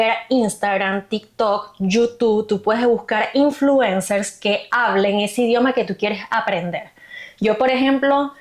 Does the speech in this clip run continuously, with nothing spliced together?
yes; 0 cuts

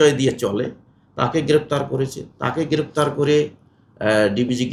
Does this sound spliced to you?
no; 0 cuts

